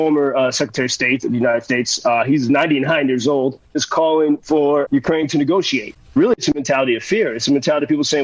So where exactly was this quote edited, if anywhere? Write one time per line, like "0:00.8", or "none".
0:03.8
0:04.9
0:06.0